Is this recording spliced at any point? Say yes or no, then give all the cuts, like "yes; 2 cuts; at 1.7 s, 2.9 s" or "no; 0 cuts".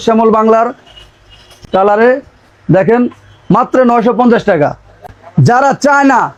no; 0 cuts